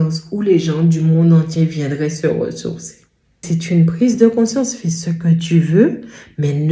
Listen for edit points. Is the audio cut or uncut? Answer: cut